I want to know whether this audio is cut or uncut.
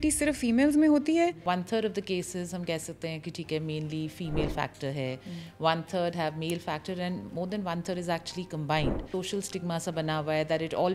cut